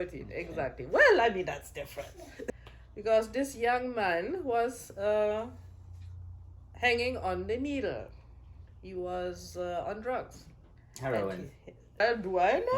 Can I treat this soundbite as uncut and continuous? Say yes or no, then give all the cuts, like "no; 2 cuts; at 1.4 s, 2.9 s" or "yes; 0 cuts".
no; 2 cuts; at 2.5 s, 12.0 s